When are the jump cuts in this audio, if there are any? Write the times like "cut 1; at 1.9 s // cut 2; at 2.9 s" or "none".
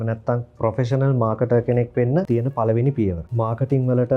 cut 1; at 2.3 s // cut 2; at 3.2 s